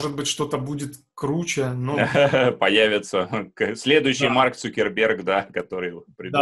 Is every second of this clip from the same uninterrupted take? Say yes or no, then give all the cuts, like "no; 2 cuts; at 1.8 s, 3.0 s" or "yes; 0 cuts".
yes; 0 cuts